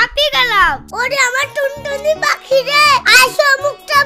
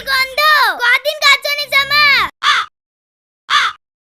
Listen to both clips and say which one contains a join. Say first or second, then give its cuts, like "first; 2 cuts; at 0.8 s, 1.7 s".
second; 1 cut; at 2.4 s